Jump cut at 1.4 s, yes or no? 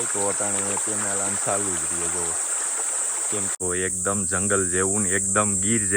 no